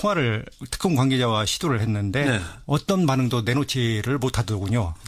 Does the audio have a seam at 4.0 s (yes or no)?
no